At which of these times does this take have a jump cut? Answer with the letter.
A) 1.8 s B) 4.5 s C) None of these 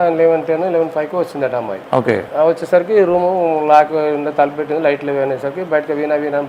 A